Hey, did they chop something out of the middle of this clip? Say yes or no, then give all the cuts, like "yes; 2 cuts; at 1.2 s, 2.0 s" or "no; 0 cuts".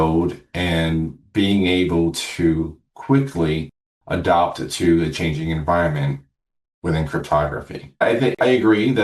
yes; 1 cut; at 8.0 s